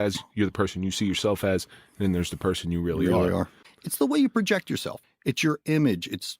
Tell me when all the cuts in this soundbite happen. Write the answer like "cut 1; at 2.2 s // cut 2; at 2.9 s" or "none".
cut 1; at 3.6 s